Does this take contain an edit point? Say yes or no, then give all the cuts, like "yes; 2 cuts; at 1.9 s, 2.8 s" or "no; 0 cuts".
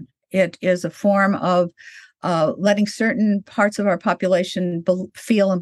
no; 0 cuts